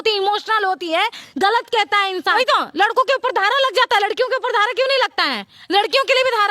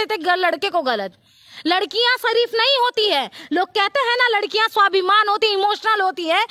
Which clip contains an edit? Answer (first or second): first